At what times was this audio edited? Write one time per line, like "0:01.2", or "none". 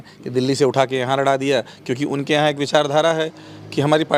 none